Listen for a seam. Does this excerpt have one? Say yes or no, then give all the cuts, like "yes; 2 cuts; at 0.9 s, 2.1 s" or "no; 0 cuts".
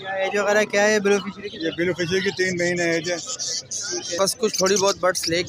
yes; 1 cut; at 4.2 s